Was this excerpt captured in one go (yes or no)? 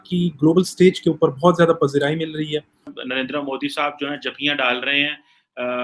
no